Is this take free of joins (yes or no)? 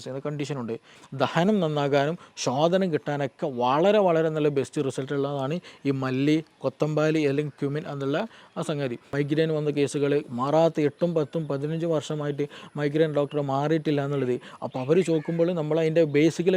no